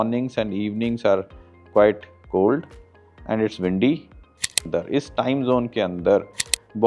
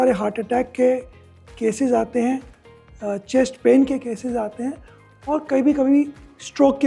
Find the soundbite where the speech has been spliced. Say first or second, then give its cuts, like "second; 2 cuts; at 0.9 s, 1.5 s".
first; 1 cut; at 4.6 s